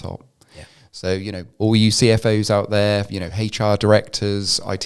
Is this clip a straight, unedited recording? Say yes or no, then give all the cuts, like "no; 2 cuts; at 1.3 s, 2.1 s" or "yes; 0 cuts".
yes; 0 cuts